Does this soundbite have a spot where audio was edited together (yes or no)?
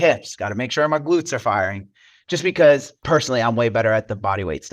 yes